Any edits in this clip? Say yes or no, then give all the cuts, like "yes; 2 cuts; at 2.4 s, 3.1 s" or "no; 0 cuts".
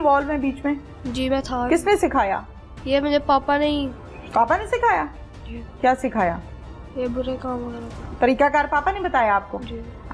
no; 0 cuts